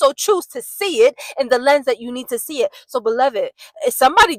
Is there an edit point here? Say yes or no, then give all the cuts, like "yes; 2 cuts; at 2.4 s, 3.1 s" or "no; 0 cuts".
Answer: no; 0 cuts